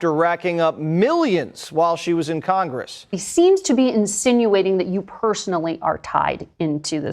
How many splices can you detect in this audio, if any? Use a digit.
1